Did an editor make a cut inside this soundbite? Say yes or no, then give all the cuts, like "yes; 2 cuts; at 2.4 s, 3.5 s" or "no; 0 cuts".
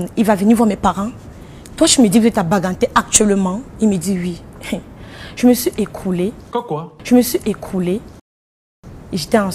no; 0 cuts